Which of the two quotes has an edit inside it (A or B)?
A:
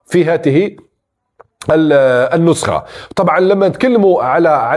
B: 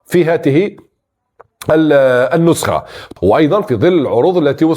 B